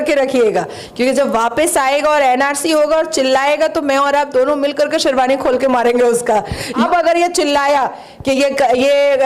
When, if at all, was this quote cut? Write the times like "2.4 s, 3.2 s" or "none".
6.8 s